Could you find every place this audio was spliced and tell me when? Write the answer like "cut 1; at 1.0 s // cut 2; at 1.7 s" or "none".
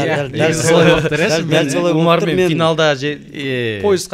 none